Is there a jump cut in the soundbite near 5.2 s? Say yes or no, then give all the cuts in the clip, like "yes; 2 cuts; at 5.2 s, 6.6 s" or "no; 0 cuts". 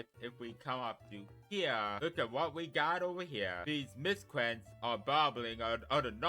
no; 2 cuts; at 2.0 s, 3.6 s